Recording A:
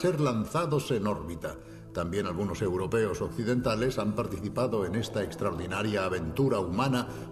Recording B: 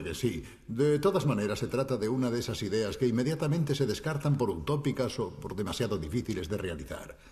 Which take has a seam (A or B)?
B